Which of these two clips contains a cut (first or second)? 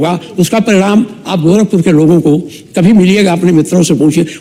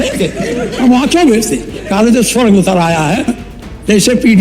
second